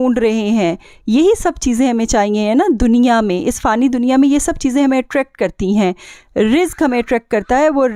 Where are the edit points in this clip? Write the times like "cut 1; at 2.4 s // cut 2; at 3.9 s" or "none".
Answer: none

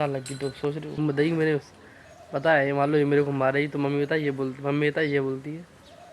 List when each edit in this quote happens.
cut 1; at 1.0 s

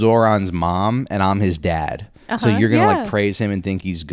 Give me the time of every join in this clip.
none

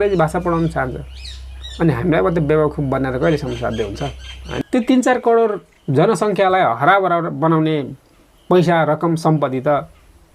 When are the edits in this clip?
cut 1; at 4.6 s

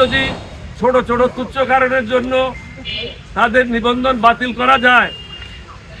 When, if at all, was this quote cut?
none

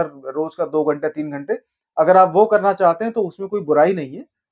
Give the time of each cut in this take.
none

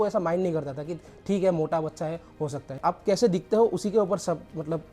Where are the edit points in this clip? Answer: cut 1; at 2.8 s

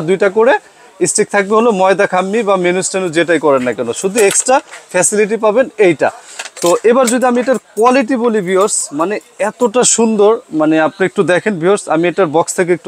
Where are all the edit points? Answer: none

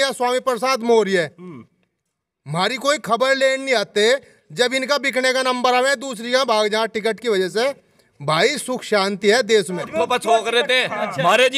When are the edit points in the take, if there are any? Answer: cut 1; at 9.9 s

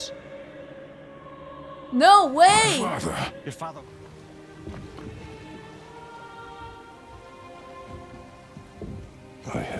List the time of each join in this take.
cut 1; at 3.7 s

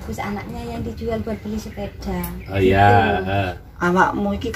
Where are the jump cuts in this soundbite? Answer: cut 1; at 3.5 s

